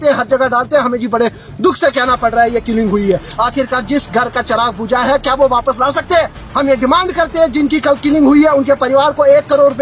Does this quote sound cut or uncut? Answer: uncut